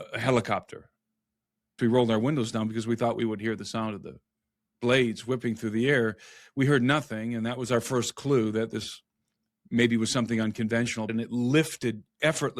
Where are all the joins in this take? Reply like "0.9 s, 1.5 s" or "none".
1.8 s, 11.1 s